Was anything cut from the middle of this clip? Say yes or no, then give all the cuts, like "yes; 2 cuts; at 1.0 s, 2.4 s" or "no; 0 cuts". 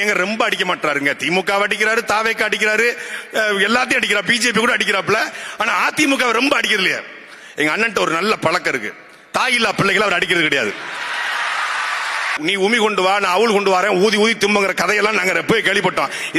yes; 1 cut; at 12.3 s